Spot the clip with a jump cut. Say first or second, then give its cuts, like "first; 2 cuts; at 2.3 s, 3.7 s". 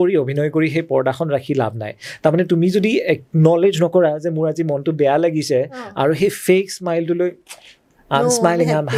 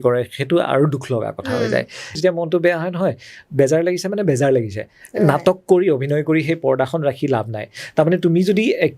second; 1 cut; at 2.2 s